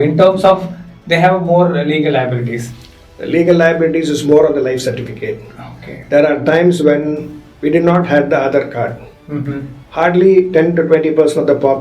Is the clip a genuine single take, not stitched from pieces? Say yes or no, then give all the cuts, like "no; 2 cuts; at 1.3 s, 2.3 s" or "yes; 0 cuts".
yes; 0 cuts